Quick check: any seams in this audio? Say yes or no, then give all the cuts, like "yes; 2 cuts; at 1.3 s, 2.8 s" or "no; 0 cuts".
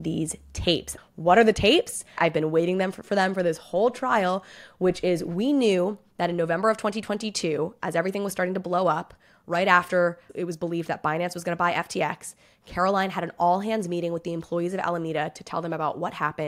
yes; 2 cuts; at 1.0 s, 2.2 s